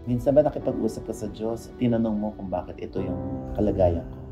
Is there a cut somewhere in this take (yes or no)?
no